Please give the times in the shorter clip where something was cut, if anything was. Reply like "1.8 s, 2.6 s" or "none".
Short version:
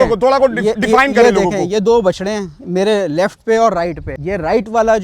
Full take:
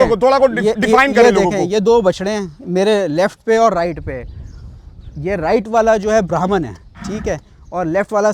4.1 s